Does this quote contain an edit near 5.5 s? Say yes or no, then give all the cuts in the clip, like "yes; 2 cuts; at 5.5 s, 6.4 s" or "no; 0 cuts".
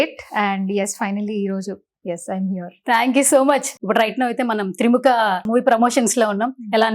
yes; 2 cuts; at 3.7 s, 5.5 s